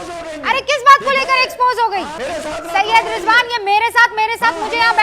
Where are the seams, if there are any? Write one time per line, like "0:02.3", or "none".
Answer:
0:02.2